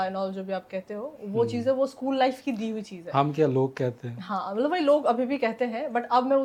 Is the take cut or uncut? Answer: uncut